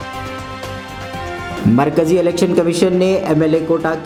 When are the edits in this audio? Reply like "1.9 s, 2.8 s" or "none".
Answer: none